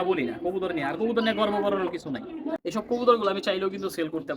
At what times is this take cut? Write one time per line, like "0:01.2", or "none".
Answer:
0:02.6